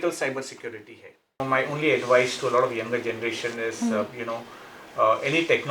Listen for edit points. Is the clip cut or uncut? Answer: cut